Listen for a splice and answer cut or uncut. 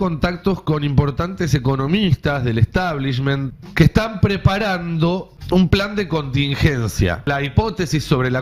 cut